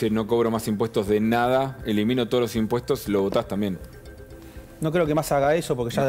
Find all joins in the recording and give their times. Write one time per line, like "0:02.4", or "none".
none